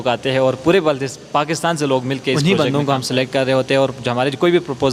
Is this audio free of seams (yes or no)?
no